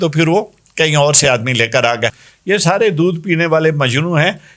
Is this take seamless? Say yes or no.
no